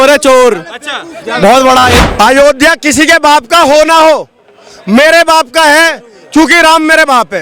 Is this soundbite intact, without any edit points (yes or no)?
no